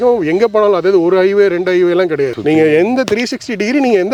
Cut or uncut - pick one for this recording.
uncut